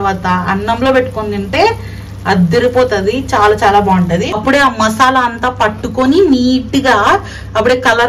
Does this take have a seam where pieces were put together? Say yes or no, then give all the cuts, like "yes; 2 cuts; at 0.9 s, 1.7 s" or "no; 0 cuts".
yes; 1 cut; at 4.4 s